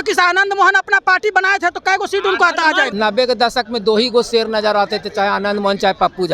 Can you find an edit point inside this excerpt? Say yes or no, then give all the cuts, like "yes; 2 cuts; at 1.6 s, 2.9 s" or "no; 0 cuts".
yes; 1 cut; at 2.9 s